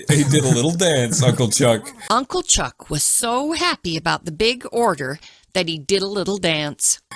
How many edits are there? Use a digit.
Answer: 0